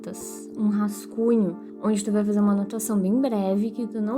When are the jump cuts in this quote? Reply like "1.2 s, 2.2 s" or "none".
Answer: 1.7 s